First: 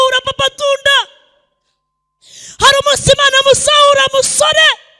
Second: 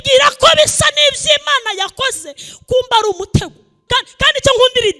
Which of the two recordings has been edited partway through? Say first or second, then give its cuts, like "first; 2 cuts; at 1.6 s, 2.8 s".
second; 1 cut; at 3.8 s